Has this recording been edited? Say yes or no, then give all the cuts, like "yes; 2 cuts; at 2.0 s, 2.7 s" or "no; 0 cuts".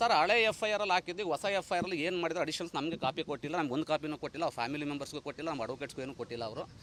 no; 0 cuts